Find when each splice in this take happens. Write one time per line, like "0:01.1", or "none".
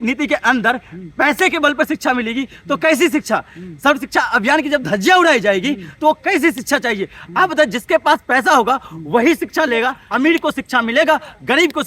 0:10.0

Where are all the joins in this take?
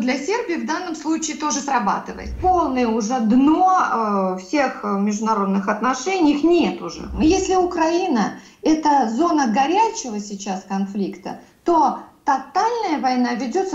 0:02.4
0:07.1

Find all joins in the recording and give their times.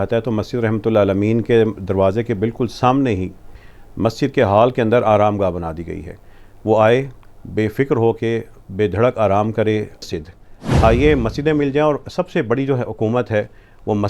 0:10.1

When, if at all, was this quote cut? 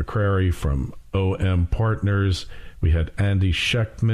0:02.7

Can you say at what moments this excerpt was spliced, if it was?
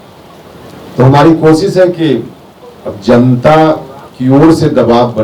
none

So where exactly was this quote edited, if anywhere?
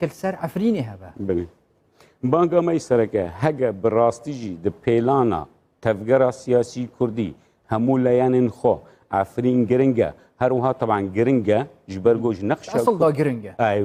none

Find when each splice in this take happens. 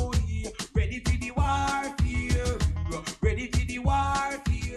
0:01.2

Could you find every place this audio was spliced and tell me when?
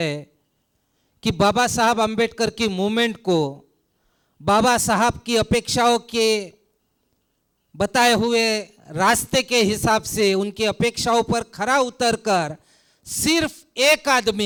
none

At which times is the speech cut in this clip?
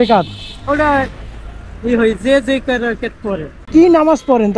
0:03.7

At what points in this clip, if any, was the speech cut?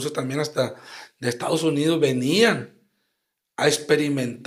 none

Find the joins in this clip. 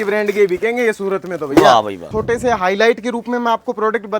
0:02.1

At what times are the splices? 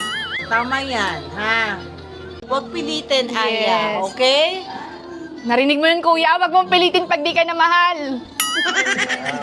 none

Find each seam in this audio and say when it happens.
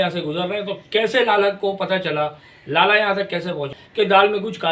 0:03.8

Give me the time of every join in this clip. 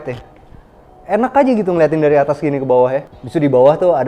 0:03.2

